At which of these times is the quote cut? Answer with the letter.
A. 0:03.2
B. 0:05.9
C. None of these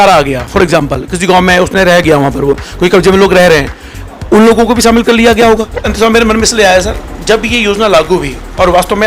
B